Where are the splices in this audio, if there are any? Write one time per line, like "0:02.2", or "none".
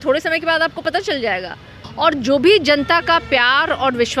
0:01.8